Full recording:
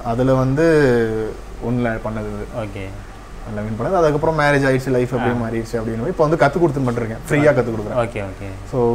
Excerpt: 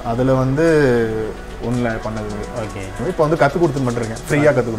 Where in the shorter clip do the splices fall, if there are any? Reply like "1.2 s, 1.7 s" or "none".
3.0 s

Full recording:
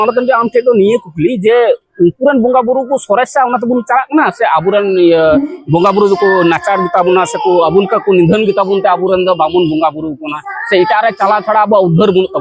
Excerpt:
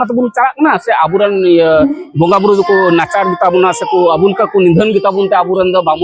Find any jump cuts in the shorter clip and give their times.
none

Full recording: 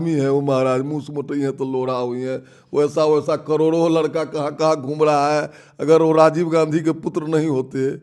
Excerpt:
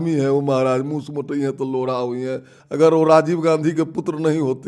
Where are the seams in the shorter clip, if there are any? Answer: 2.5 s

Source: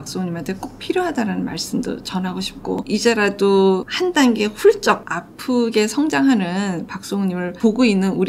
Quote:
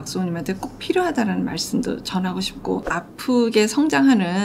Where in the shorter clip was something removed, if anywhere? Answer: 2.8 s

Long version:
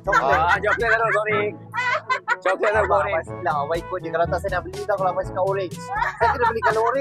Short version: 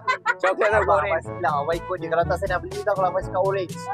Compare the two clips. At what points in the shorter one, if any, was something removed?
none

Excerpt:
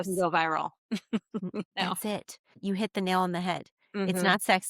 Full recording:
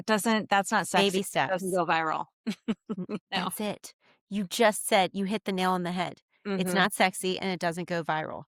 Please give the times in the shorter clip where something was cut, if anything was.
2.6 s

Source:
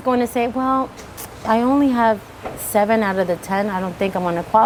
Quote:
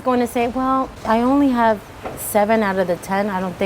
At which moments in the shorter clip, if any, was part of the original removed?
0.9 s

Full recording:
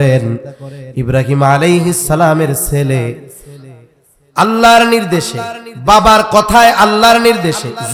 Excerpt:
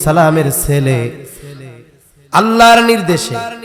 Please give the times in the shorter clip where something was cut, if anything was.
none

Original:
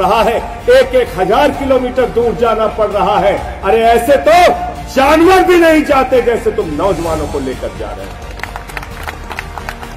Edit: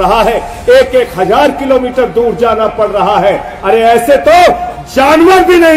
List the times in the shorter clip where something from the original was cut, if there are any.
none

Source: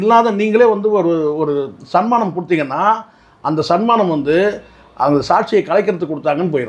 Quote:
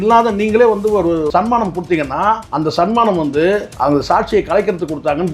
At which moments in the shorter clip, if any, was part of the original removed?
1.3 s, 2.5 s, 3.7 s

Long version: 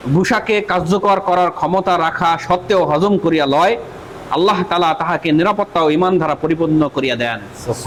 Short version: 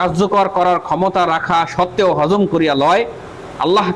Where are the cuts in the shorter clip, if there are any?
none

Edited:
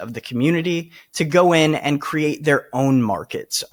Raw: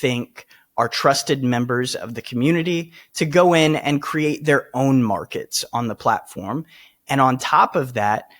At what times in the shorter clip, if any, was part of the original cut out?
none

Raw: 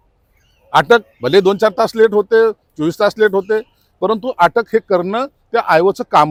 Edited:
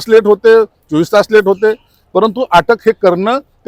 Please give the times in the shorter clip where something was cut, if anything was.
none

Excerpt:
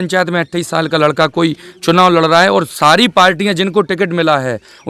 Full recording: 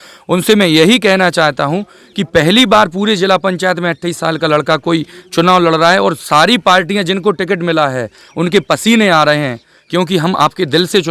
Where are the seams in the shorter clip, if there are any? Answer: none

